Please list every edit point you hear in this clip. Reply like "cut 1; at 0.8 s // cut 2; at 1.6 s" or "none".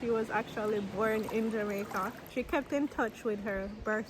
cut 1; at 2.2 s